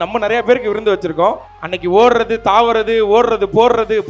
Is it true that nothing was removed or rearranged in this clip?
no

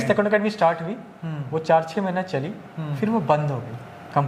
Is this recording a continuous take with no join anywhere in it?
yes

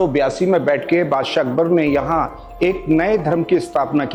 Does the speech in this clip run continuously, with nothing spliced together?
yes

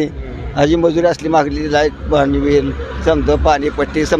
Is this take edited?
no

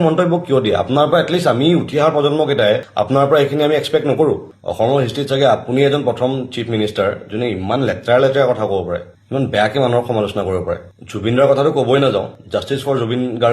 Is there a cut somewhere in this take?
yes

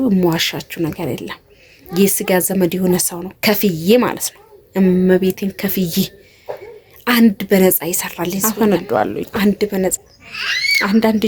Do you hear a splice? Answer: yes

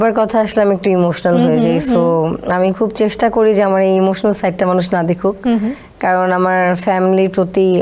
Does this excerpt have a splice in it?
no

